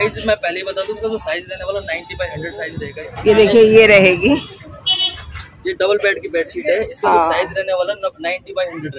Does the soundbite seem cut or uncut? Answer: cut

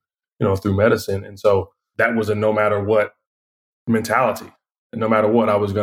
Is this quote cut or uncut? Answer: cut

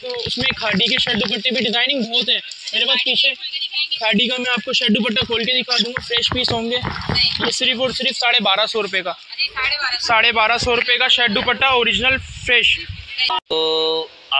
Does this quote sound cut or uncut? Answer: cut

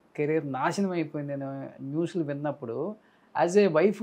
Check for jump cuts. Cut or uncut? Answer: uncut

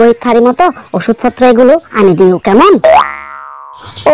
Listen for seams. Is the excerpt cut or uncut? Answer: cut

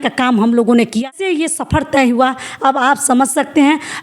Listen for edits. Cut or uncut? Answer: cut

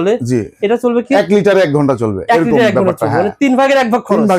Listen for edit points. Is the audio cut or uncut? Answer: uncut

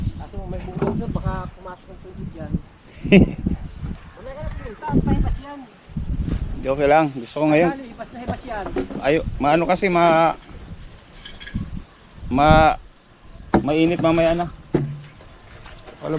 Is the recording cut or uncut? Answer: uncut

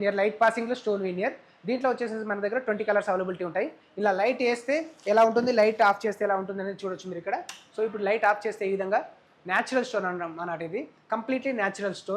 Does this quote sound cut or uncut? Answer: uncut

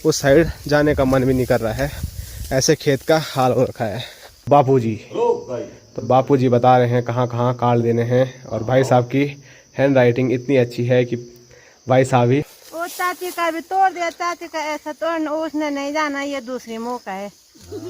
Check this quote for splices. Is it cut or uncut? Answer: cut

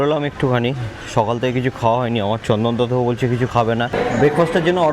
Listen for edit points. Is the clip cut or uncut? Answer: cut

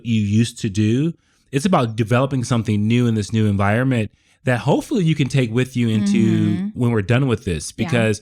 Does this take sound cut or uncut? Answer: uncut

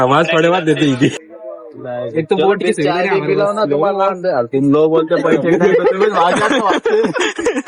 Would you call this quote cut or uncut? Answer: cut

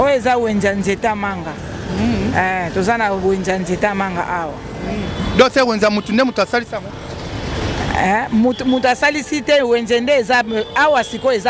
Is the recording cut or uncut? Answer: uncut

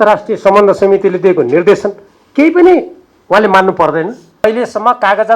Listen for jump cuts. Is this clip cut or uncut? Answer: cut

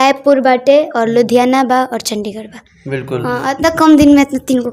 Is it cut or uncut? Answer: uncut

